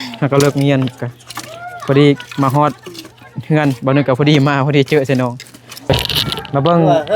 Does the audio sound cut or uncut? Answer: cut